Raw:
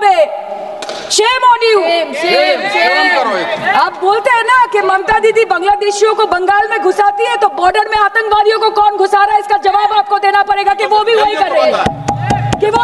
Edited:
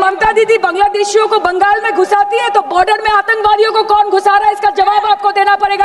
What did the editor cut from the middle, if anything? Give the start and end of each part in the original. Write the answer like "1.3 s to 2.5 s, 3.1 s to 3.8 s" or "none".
none